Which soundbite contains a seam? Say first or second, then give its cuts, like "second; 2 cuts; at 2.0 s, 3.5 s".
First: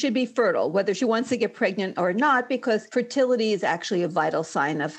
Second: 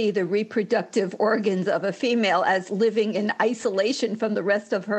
first; 1 cut; at 2.9 s